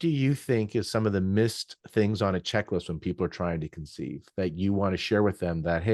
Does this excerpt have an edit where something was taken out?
no; 0 cuts

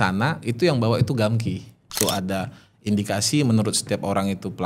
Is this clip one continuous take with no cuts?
no; 1 cut; at 1.9 s

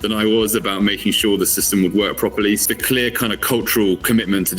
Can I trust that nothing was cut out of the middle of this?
no; 1 cut; at 2.6 s

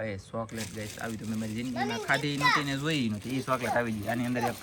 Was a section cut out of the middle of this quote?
no; 0 cuts

